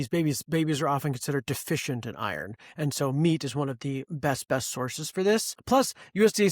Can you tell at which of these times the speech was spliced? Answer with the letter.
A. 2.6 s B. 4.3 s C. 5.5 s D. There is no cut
C